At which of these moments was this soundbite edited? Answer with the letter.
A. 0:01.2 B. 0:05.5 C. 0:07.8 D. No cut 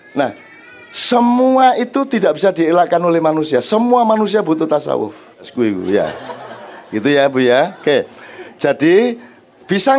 B